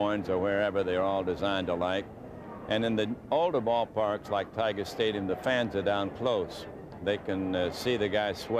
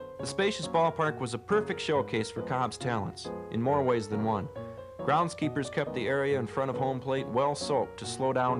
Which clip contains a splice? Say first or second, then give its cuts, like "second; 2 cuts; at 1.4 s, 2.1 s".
first; 1 cut; at 7.2 s